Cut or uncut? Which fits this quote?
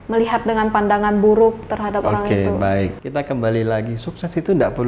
cut